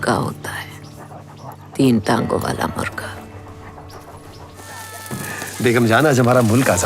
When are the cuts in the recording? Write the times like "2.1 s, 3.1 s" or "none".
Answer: 4.7 s